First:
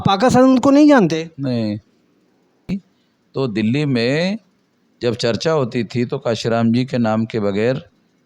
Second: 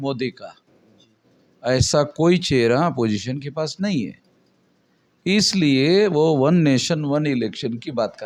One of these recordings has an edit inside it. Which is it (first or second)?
first